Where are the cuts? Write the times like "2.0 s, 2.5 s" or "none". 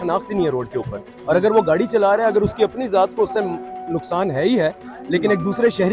none

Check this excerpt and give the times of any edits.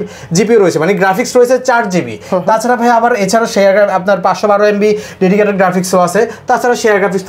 none

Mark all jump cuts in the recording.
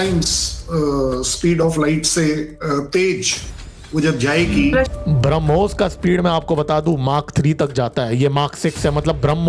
4.9 s

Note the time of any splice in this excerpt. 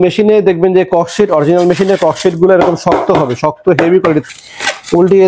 4.3 s

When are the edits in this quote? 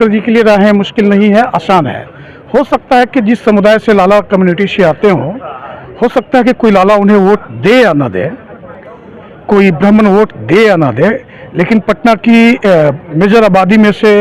none

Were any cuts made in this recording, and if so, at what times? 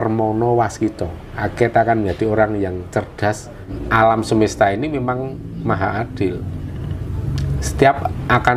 3.8 s

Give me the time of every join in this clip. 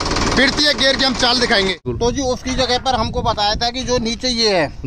1.8 s

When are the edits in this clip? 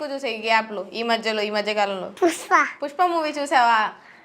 2.1 s, 2.8 s

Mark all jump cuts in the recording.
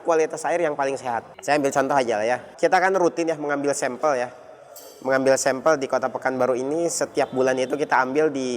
1.3 s, 2.5 s

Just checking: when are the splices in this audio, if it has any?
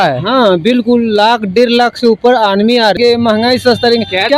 3.0 s

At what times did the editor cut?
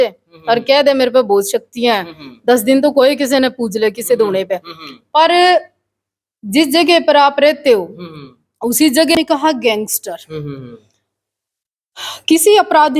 9.1 s

